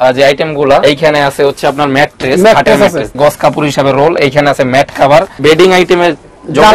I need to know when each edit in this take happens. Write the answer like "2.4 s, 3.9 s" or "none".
0.8 s, 3.1 s, 5.4 s

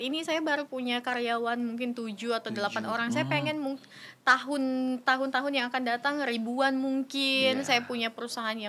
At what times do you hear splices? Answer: none

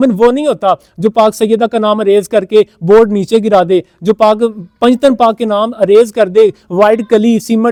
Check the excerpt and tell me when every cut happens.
none

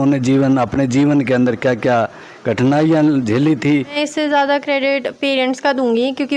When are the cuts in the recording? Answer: 3.9 s

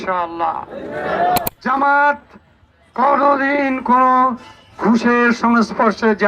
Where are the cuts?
1.4 s

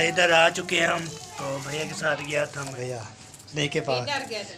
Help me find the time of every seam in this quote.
2.7 s

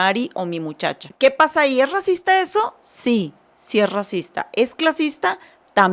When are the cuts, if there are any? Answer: 1.1 s

